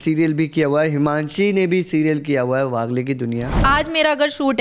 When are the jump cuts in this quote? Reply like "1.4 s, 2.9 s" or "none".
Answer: 3.5 s